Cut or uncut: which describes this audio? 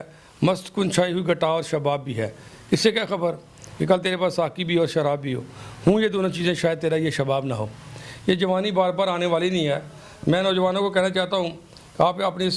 uncut